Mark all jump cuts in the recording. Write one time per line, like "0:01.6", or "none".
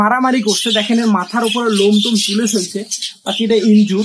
none